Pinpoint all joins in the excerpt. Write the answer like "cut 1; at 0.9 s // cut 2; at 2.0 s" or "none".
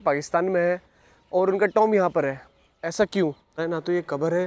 cut 1; at 3.6 s